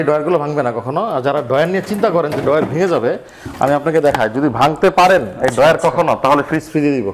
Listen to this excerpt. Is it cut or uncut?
uncut